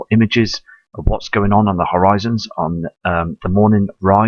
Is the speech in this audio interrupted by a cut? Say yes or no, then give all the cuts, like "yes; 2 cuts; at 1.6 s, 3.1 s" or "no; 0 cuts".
yes; 1 cut; at 2.3 s